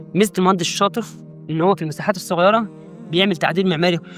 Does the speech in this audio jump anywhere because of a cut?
no; 0 cuts

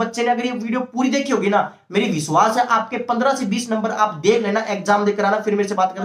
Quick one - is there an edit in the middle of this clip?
no; 0 cuts

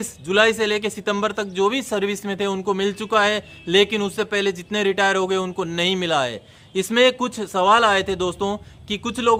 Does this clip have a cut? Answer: no; 0 cuts

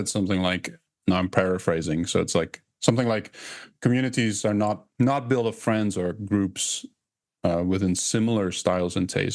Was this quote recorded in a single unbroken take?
no; 2 cuts; at 3.7 s, 4.9 s

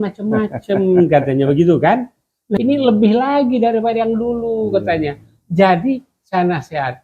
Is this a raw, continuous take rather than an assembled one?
no; 1 cut; at 2.4 s

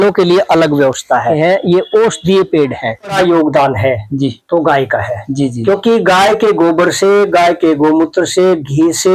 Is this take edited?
yes; 2 cuts; at 1.3 s, 3.1 s

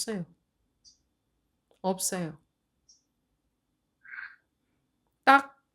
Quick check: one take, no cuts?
no; 1 cut; at 3.9 s

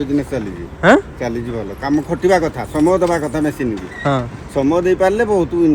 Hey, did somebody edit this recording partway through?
no; 0 cuts

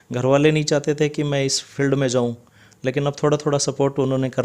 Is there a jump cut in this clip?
no; 0 cuts

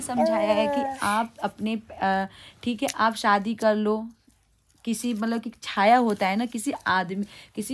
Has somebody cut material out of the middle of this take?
no; 0 cuts

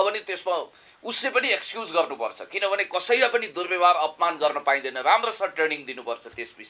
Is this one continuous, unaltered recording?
yes; 0 cuts

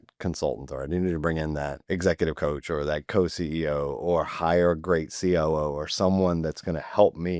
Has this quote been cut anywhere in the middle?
yes; 1 cut; at 1.8 s

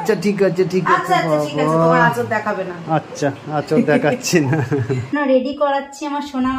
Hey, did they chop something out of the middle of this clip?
yes; 1 cut; at 5.1 s

